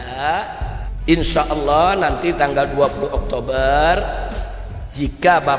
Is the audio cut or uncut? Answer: cut